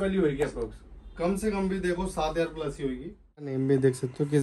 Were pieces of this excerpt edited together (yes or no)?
yes